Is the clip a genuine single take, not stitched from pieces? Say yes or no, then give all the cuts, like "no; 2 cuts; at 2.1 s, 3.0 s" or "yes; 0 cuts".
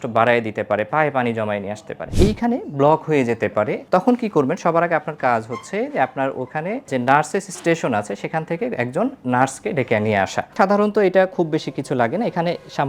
no; 4 cuts; at 2.1 s, 3.8 s, 6.9 s, 10.5 s